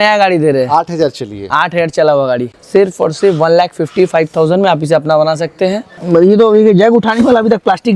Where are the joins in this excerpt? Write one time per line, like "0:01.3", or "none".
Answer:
0:02.5
0:05.9